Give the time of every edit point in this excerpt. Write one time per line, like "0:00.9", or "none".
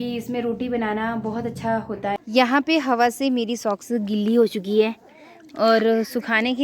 0:02.2